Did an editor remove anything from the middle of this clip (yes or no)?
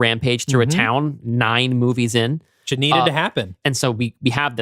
yes